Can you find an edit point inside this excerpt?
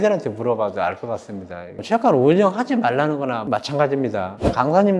no; 0 cuts

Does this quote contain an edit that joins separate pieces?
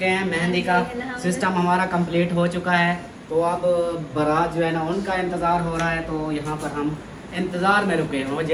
no; 0 cuts

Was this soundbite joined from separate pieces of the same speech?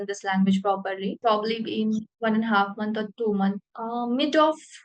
yes; 3 cuts; at 1.2 s, 2.1 s, 3.7 s

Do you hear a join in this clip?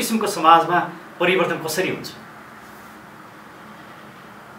no; 0 cuts

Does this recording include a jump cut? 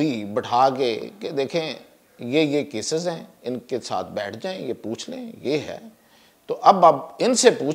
no; 0 cuts

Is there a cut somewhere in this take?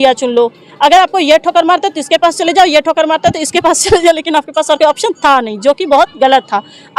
no; 0 cuts

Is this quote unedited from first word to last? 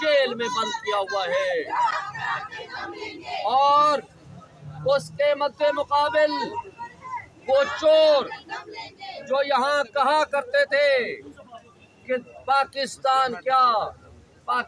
yes; 0 cuts

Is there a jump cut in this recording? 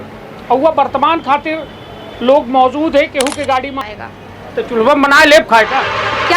yes; 1 cut; at 3.8 s

